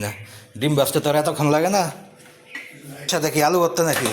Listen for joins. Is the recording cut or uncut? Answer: cut